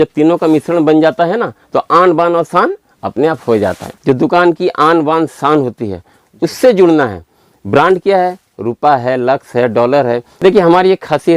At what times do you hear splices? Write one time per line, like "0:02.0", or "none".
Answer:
0:03.9
0:10.3

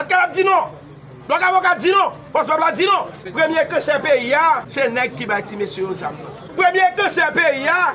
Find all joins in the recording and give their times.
0:03.2
0:04.7
0:06.4

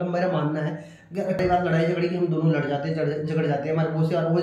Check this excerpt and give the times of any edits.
0:01.4

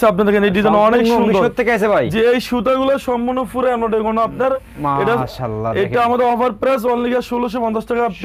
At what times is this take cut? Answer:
none

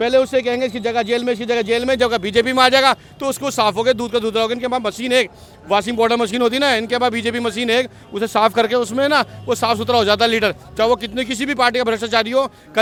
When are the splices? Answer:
none

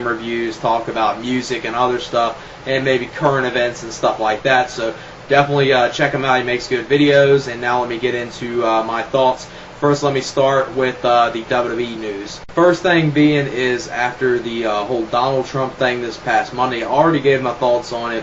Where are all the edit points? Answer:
0:06.9

